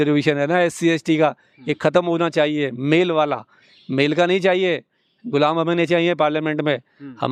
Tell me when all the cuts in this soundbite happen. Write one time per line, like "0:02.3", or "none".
none